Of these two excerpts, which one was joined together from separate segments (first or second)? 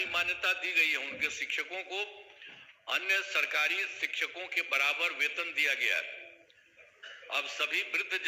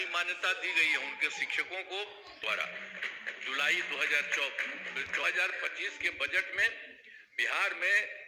second